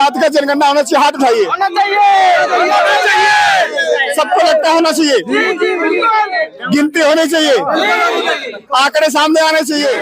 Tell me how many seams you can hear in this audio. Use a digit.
0